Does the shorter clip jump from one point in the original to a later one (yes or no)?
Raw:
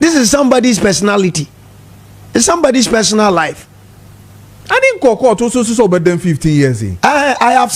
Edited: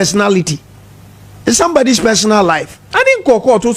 yes